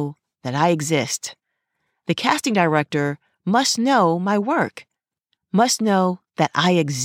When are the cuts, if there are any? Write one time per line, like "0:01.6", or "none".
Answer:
none